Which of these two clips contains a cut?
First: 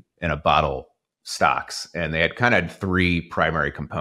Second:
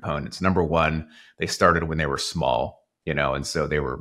second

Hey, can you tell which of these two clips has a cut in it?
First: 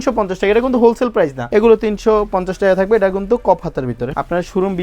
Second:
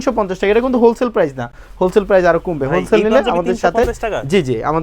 first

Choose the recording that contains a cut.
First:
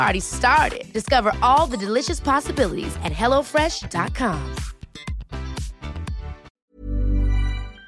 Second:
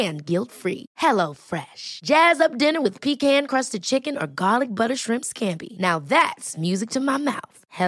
first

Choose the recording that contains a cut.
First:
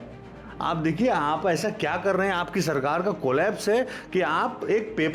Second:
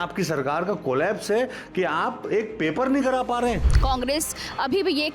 second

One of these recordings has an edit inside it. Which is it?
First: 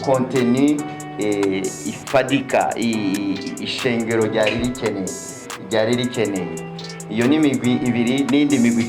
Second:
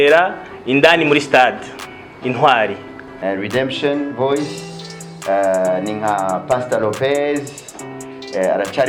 second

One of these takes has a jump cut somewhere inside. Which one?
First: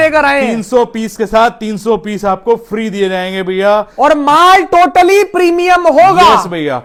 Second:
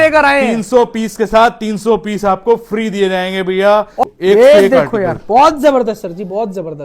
second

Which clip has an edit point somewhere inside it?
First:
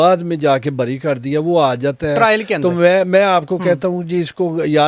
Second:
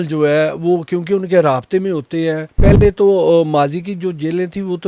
second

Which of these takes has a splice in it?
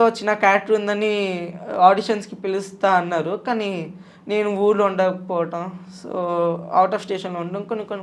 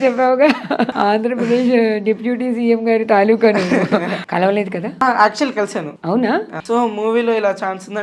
second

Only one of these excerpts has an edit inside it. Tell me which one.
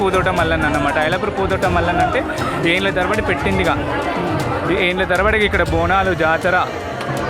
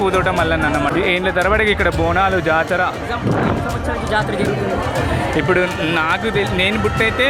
second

